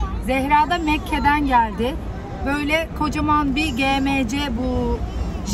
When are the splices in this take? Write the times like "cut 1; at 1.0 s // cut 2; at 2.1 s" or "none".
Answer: none